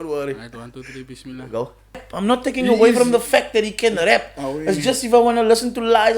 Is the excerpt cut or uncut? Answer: cut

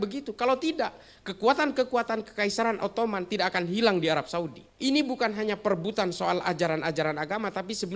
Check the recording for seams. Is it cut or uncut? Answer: cut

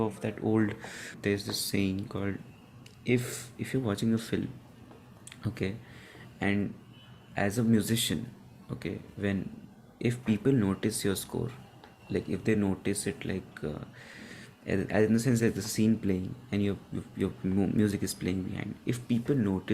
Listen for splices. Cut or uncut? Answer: cut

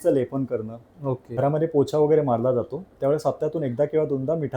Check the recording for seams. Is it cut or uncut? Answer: cut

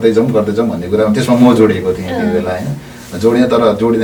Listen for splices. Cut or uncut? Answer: uncut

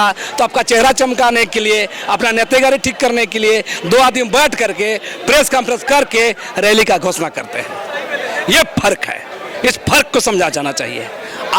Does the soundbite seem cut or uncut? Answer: uncut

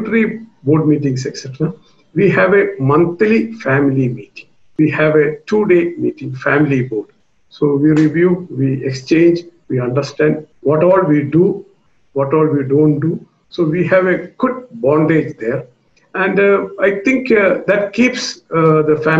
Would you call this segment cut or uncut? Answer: cut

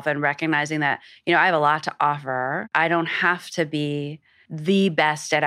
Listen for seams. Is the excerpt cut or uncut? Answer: cut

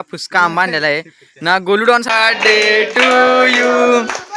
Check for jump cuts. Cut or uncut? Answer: cut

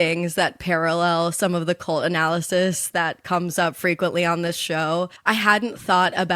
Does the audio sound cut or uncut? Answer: uncut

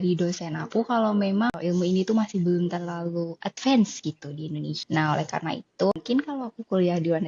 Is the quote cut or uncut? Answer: cut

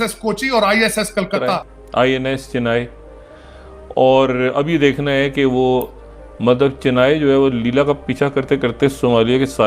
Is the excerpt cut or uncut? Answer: cut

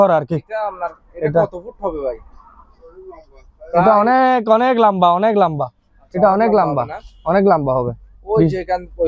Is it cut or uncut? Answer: uncut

